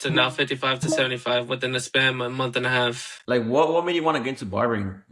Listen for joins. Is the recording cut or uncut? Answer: cut